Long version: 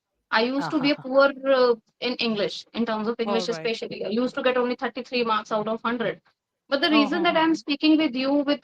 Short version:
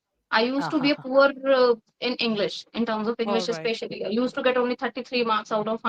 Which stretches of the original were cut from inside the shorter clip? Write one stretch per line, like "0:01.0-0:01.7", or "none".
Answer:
none

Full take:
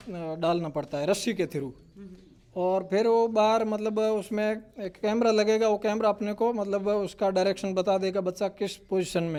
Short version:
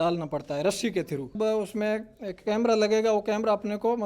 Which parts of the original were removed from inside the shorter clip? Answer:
0:01.8-0:03.9

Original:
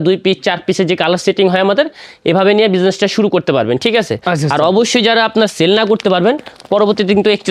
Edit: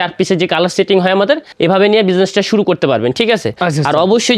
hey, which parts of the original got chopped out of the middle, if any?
0:02.0-0:02.1

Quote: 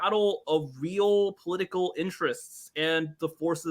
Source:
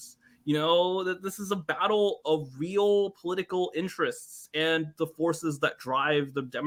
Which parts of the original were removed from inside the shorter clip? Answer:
none

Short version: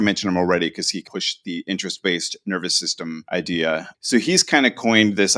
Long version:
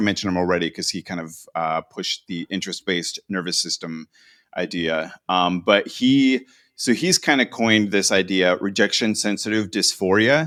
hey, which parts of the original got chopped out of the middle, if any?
0:01.1-0:01.9
0:04.0-0:04.5
0:05.1-0:06.6

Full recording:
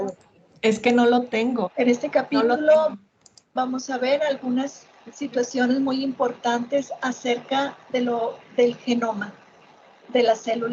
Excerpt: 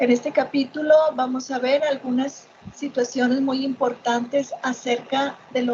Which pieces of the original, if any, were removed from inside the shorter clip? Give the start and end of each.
0:02.9-0:03.5

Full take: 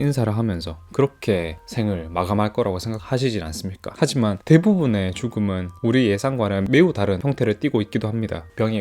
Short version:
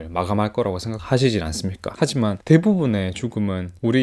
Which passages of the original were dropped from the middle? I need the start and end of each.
none

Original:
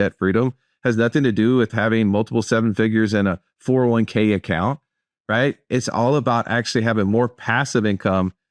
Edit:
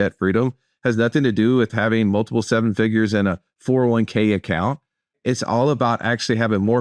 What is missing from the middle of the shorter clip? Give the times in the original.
0:05.2-0:05.6

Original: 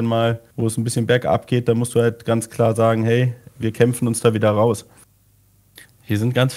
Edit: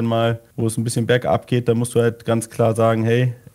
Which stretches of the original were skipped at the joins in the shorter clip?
none

